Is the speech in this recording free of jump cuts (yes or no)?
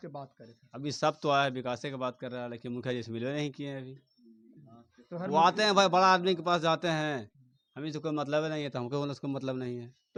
yes